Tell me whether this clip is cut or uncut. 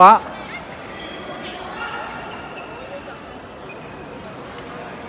uncut